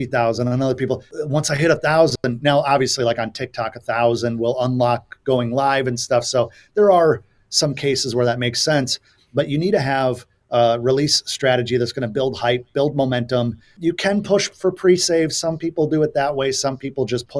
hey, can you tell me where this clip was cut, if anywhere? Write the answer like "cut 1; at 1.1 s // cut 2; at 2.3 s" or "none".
cut 1; at 1.1 s // cut 2; at 13.7 s